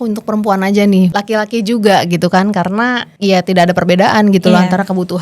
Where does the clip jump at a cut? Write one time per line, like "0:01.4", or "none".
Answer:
0:01.1
0:03.1